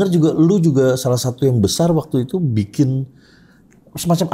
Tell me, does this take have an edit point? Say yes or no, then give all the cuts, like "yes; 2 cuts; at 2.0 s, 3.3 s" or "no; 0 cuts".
no; 0 cuts